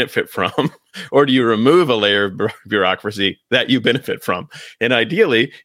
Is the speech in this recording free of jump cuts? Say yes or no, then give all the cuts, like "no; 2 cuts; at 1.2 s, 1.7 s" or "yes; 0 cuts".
yes; 0 cuts